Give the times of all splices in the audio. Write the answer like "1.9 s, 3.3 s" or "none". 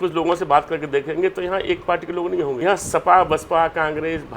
2.6 s

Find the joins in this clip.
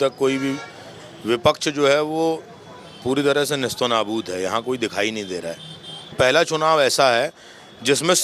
6.1 s

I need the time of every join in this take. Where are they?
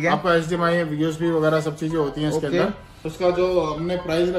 3.0 s

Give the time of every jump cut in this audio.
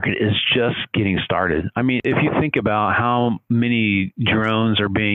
2.0 s

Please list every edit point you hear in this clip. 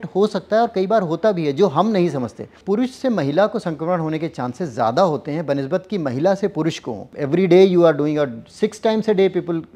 2.6 s, 7.1 s

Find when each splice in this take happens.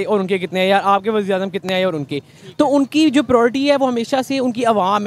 none

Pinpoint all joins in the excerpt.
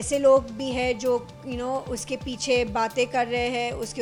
none

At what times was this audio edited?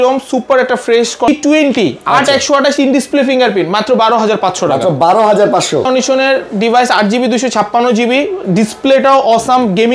1.3 s, 5.9 s

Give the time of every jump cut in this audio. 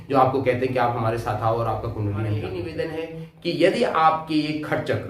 2.6 s

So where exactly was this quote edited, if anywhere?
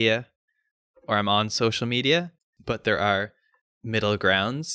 2.5 s

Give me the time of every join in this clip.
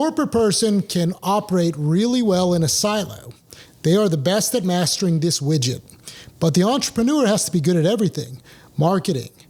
none

